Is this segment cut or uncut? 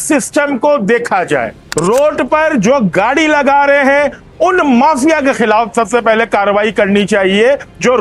uncut